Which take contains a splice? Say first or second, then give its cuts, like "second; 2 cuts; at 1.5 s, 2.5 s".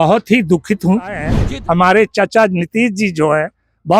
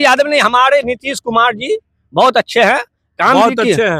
first; 1 cut; at 1.3 s